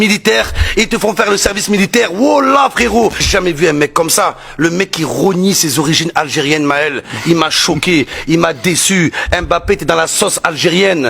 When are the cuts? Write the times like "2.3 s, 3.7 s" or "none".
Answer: none